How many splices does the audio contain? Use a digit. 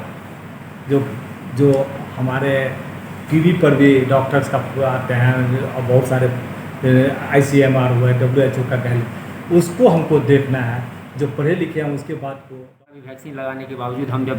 1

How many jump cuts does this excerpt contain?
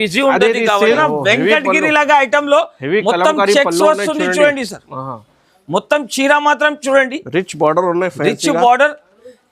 1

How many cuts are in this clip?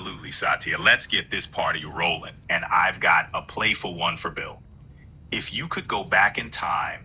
1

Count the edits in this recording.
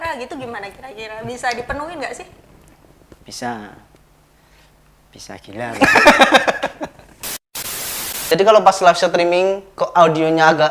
1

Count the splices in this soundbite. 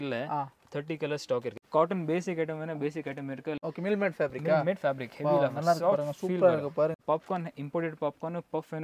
3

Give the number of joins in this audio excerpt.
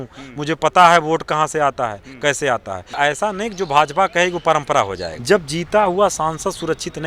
2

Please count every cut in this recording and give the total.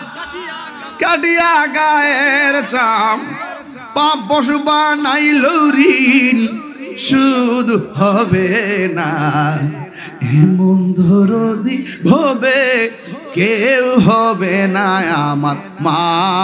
0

